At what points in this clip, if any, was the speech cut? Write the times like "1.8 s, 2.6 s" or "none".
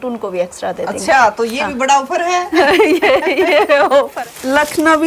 4.1 s